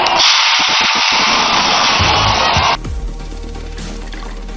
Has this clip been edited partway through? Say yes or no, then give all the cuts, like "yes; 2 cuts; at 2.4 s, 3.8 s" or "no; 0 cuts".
yes; 1 cut; at 2.8 s